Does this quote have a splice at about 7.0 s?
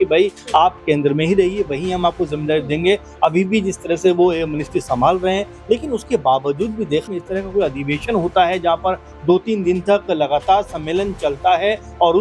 yes; 1 cut; at 7.0 s

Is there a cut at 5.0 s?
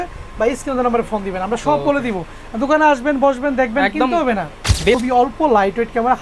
yes; 1 cut; at 5.0 s

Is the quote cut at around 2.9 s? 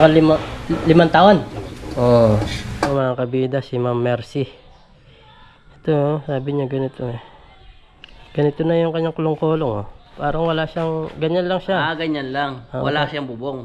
yes; 1 cut; at 2.9 s

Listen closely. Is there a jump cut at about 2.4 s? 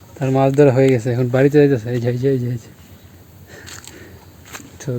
no; 0 cuts

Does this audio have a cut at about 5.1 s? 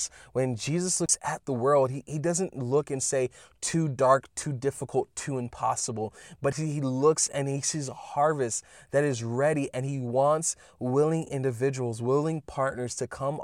no; 1 cut; at 1.2 s

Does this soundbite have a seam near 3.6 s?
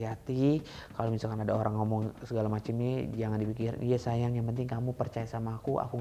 no; 0 cuts

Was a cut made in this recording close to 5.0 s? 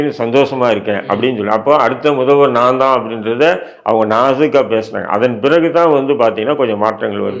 no; 0 cuts

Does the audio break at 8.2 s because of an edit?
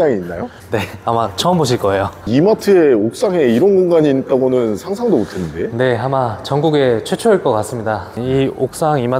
yes; 2 cuts; at 2.2 s, 8.2 s

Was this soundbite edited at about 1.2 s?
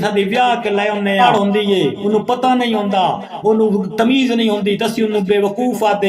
yes; 1 cut; at 1.2 s

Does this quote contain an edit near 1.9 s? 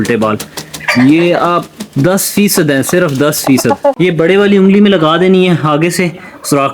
no; 1 cut; at 3.9 s

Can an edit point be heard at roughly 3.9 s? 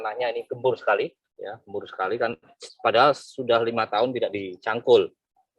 no; 1 cut; at 1.3 s

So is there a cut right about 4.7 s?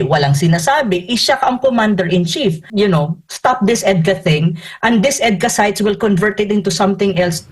no; 1 cut; at 2.6 s

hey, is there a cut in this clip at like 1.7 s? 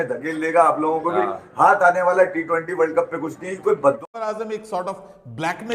no; 1 cut; at 4.0 s

